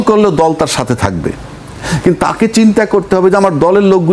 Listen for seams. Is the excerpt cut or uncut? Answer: uncut